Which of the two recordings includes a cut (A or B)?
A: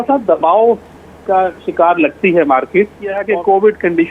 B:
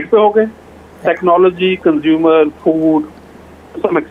A